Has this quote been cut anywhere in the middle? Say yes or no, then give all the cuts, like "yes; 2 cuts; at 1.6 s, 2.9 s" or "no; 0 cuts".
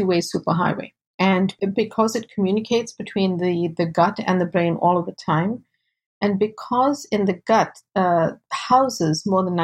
yes; 1 cut; at 1.5 s